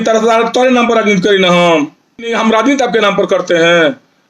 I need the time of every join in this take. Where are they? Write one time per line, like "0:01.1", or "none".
0:02.3